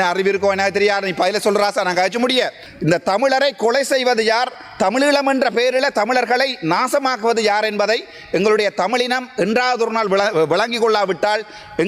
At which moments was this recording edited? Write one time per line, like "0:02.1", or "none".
0:02.6